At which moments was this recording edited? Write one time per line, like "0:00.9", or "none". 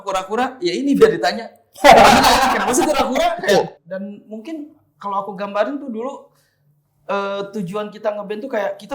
0:03.7